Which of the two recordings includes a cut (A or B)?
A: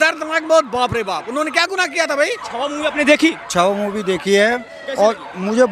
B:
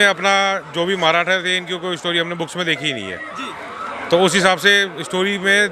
A